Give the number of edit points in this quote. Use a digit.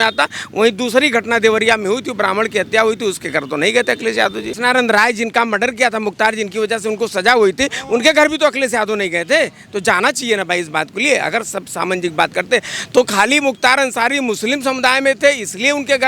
1